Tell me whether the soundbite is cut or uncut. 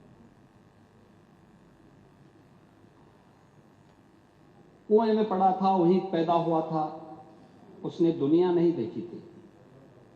uncut